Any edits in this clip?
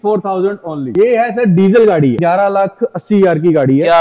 yes; 2 cuts; at 0.8 s, 2.2 s

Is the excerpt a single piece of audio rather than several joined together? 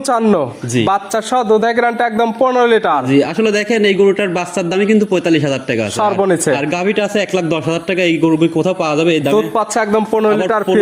yes; 0 cuts

